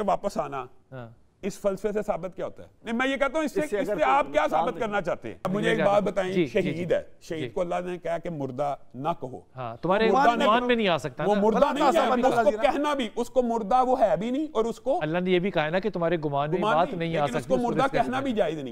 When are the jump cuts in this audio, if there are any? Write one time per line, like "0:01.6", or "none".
0:02.7
0:05.4